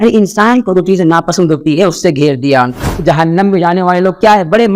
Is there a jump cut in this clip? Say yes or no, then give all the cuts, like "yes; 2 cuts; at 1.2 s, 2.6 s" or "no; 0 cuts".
yes; 1 cut; at 2.8 s